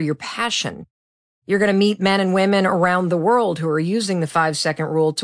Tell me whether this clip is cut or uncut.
uncut